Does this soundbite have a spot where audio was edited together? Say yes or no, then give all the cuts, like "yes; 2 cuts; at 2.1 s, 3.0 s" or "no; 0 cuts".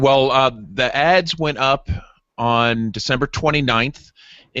yes; 1 cut; at 2.8 s